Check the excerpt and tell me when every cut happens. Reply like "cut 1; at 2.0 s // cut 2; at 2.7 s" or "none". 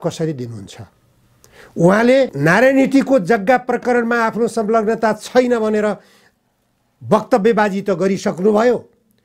none